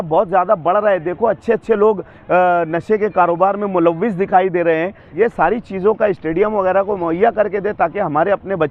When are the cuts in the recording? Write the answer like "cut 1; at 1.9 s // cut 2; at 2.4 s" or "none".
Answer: cut 1; at 5.0 s